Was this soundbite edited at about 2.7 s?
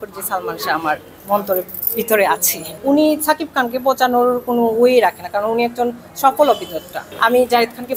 yes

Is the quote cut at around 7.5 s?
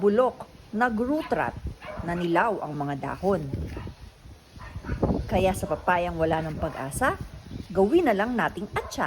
no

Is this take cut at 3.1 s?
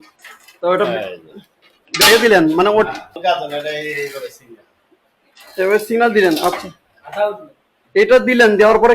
yes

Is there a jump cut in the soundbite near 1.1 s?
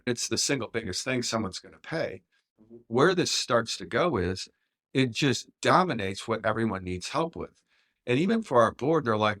no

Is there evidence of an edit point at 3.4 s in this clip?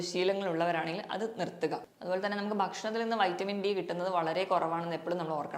no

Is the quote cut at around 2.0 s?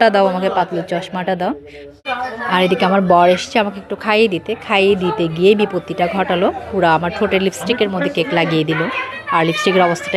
yes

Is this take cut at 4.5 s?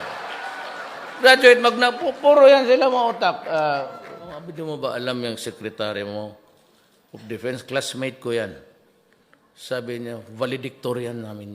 yes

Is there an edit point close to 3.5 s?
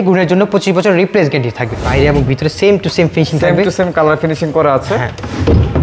no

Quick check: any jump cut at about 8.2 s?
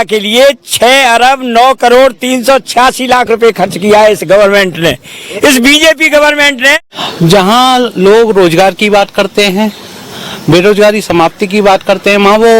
no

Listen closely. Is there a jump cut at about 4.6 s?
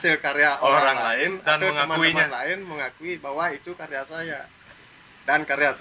yes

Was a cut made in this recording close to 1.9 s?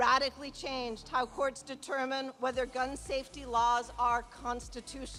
no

